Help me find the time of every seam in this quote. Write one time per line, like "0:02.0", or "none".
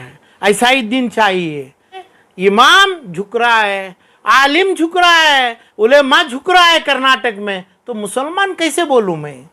0:02.1

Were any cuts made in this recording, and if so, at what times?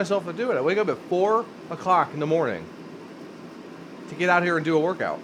none

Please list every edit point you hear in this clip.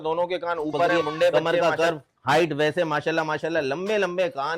0:01.3

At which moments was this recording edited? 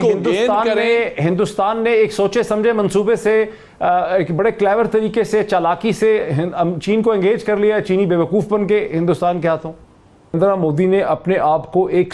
0:10.3

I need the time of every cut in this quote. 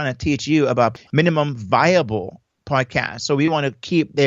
0:00.9

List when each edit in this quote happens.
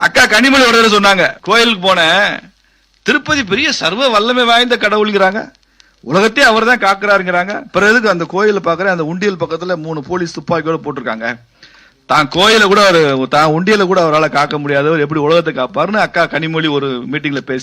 0:01.4

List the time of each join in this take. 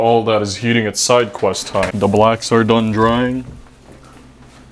0:01.9

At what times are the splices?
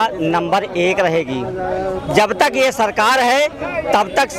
none

